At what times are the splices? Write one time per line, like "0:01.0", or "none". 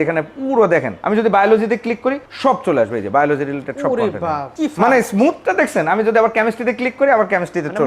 0:00.9
0:02.3
0:04.5